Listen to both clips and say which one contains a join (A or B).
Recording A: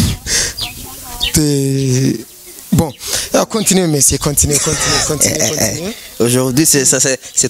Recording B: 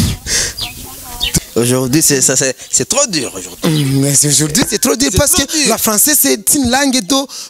B